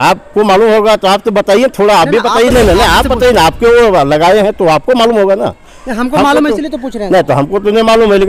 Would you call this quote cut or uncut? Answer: uncut